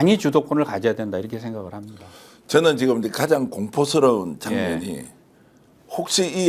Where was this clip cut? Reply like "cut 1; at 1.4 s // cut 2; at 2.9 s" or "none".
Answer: none